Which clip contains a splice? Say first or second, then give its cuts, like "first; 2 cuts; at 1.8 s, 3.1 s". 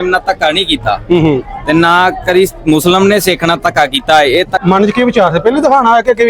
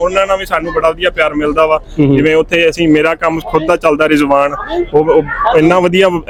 first; 1 cut; at 4.6 s